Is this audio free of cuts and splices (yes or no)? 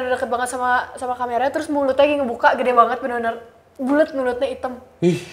yes